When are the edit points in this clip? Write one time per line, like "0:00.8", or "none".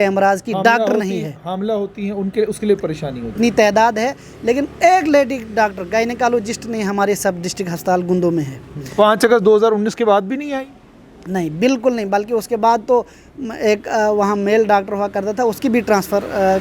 0:03.3